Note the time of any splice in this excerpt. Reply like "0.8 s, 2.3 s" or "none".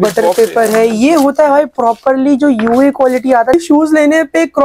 3.5 s

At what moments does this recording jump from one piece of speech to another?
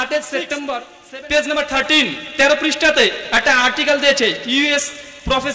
0.9 s

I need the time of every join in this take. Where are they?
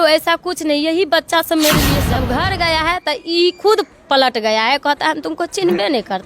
2.2 s

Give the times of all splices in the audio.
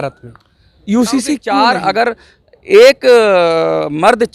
1.4 s

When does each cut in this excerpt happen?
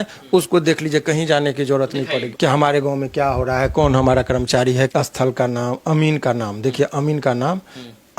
2.3 s, 4.9 s

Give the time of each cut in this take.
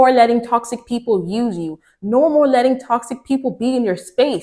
none

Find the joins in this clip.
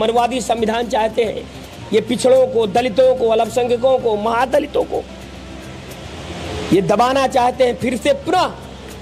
none

